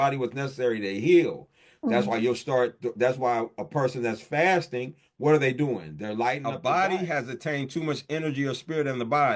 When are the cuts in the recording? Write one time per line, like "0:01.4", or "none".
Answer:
0:06.5